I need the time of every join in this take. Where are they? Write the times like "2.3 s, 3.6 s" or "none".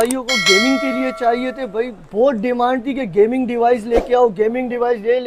none